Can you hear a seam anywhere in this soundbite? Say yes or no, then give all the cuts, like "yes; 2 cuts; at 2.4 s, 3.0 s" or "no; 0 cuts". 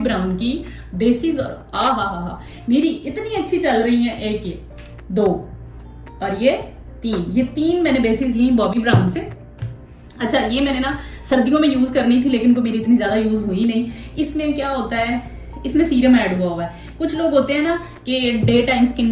no; 0 cuts